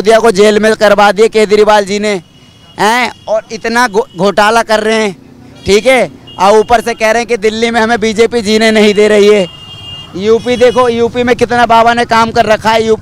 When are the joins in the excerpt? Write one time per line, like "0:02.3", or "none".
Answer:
none